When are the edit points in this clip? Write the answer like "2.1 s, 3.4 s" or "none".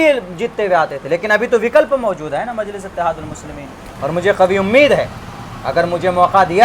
3.9 s